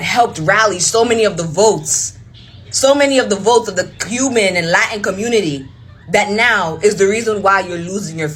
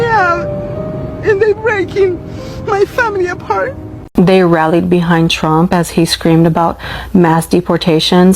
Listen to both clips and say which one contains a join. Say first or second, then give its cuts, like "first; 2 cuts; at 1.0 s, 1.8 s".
second; 1 cut; at 3.9 s